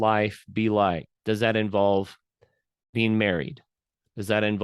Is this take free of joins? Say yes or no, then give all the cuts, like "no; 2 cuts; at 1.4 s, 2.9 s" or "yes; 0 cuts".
no; 1 cut; at 1.1 s